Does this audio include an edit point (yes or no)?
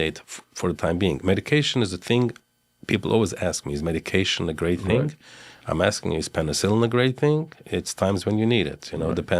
no